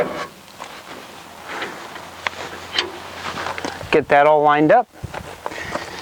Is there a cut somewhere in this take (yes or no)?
no